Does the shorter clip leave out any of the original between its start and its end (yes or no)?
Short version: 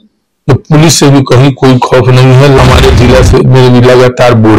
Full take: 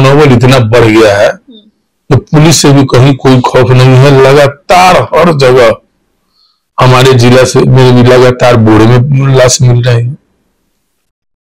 yes